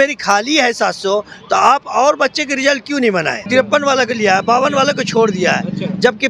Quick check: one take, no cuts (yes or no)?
no